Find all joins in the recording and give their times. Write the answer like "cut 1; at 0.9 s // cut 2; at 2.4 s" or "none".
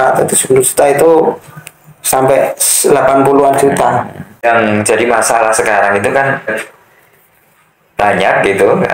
cut 1; at 4.5 s // cut 2; at 6.5 s